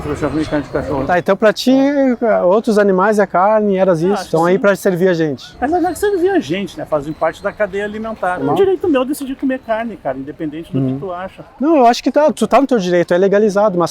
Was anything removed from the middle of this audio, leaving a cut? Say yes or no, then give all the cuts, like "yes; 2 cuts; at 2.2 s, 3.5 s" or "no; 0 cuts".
yes; 4 cuts; at 1.1 s, 4.2 s, 8.4 s, 11.4 s